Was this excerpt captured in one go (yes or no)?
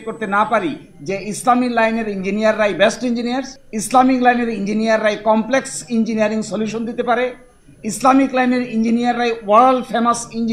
yes